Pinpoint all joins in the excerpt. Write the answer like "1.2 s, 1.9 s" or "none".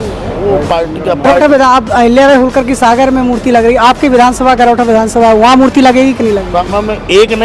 1.3 s, 6.6 s